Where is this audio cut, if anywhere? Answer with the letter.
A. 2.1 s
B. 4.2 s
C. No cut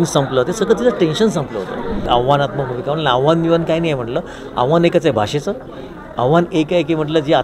A